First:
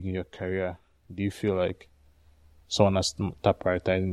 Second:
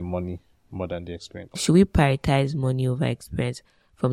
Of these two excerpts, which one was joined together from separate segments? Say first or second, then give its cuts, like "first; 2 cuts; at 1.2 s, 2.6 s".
second; 1 cut; at 1.6 s